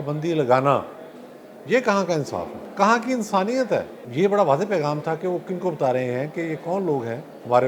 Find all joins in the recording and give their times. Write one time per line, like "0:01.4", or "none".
0:02.6
0:04.0